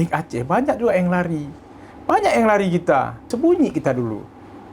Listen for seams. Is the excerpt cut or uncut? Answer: cut